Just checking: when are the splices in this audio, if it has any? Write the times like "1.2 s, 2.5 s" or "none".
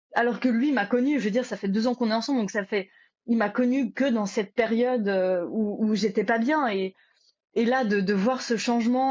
none